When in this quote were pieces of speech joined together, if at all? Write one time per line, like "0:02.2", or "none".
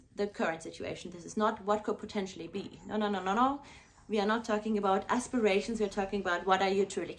none